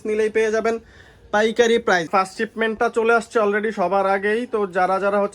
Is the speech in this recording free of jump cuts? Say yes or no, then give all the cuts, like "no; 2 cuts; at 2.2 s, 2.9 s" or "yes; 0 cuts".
no; 1 cut; at 2.1 s